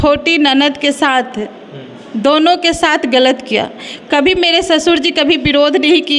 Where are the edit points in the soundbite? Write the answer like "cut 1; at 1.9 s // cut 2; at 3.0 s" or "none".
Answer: none